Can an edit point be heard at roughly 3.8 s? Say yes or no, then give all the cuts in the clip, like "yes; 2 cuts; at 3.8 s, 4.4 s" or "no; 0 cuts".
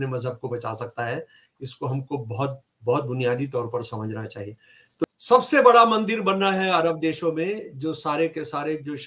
no; 1 cut; at 5.0 s